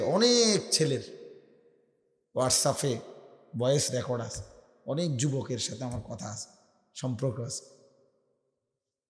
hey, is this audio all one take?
yes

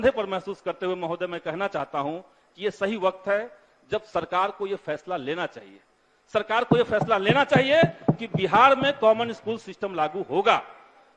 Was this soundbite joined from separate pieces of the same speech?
no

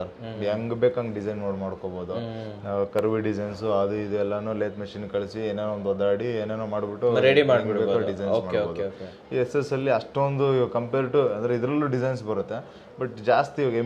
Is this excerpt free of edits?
yes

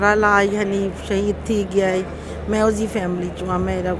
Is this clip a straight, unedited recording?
yes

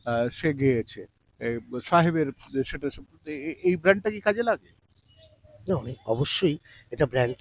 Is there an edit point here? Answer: no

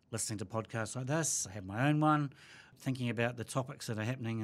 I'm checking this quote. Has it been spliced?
yes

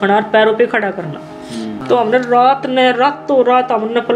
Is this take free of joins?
no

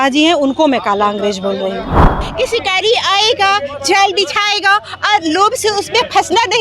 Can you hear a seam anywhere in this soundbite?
yes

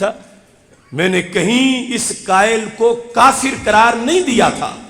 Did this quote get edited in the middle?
no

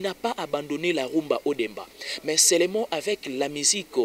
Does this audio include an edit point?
no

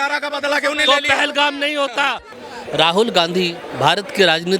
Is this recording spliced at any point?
yes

